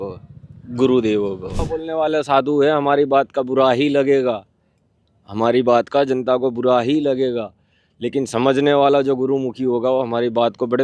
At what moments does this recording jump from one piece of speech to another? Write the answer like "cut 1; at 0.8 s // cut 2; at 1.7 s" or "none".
cut 1; at 1.6 s

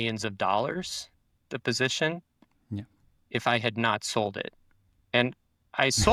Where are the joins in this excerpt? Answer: none

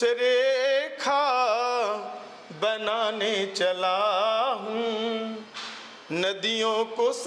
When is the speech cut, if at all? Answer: none

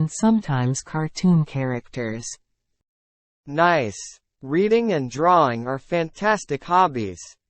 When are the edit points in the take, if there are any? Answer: cut 1; at 3.6 s

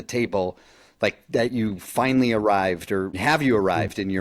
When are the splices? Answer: cut 1; at 3.1 s

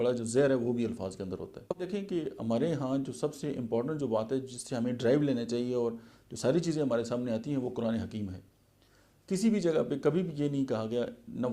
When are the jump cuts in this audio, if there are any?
cut 1; at 1.8 s

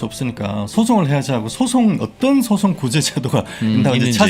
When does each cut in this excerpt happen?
none

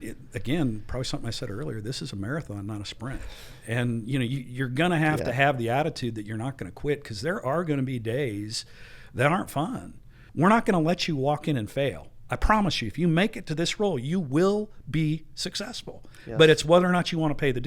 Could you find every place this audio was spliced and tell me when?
cut 1; at 10.2 s

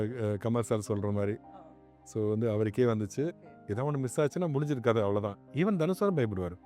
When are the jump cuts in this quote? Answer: cut 1; at 3.4 s

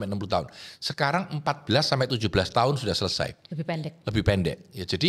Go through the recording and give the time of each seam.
none

